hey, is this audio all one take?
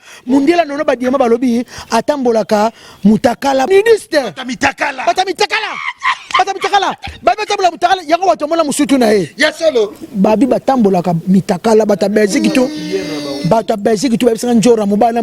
no; 1 cut; at 3.7 s

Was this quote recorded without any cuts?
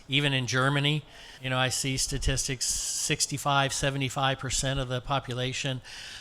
no; 1 cut; at 1.4 s

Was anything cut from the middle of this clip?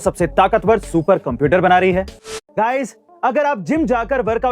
yes; 1 cut; at 2.4 s

